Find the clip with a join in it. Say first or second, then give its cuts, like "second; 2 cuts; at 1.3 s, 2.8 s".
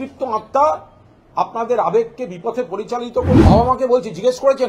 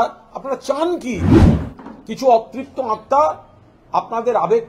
first; 1 cut; at 3.4 s